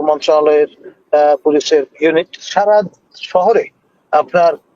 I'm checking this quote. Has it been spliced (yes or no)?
yes